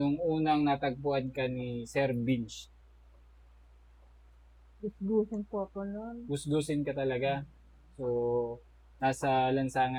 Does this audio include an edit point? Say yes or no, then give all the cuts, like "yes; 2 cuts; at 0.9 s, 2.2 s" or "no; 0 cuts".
no; 0 cuts